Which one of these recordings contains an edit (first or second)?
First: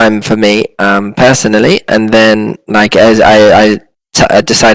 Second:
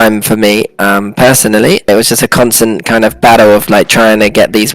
second